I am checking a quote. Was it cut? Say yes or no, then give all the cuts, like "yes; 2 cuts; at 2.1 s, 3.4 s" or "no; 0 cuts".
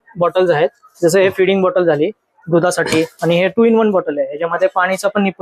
no; 0 cuts